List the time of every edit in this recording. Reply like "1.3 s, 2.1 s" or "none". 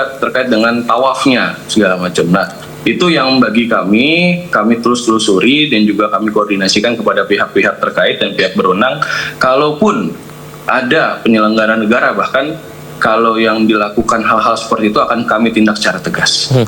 none